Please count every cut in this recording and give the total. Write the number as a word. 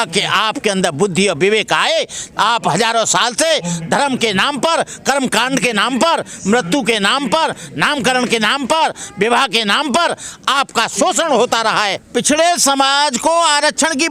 one